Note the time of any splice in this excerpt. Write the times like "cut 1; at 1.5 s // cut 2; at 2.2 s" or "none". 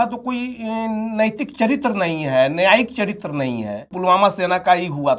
cut 1; at 3.9 s